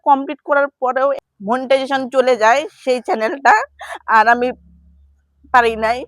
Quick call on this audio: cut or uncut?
cut